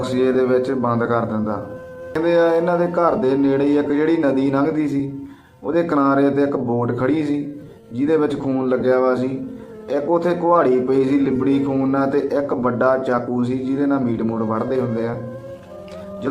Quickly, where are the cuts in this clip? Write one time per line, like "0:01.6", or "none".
0:02.2